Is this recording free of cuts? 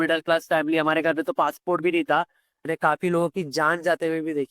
no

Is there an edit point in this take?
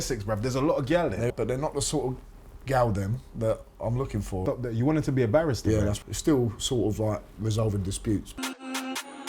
yes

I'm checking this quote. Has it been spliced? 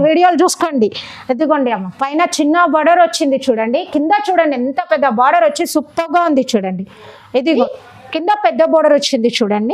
yes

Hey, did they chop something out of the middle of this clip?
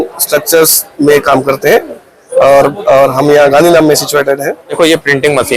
yes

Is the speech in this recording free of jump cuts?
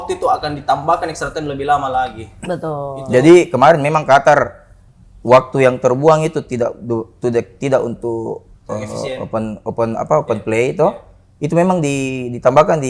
yes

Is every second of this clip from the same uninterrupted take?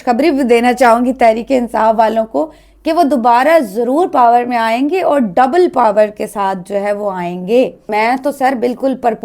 no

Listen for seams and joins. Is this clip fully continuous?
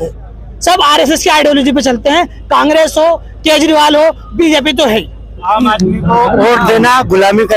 no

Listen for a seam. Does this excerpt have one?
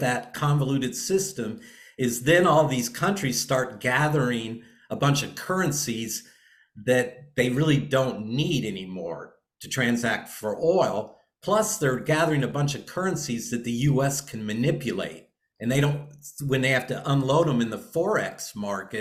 no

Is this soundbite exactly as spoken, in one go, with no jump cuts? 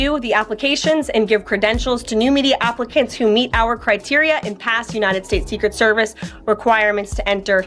yes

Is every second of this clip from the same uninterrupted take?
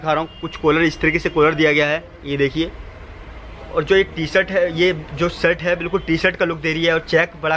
yes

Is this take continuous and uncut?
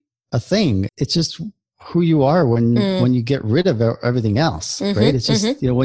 no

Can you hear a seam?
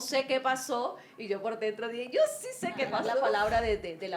yes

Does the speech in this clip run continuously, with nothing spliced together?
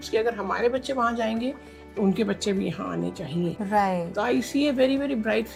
yes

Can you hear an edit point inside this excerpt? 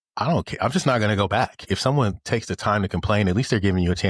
yes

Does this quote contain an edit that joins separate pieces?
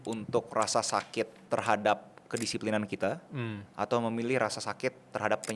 yes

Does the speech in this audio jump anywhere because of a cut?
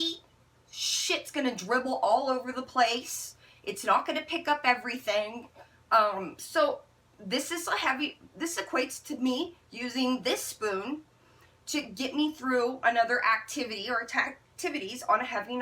no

